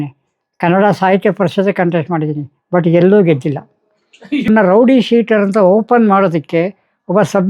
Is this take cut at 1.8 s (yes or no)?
no